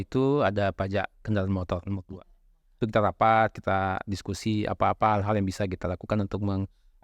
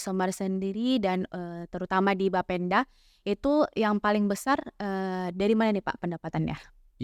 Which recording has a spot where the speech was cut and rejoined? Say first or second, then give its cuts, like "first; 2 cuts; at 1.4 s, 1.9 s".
first; 1 cut; at 2.7 s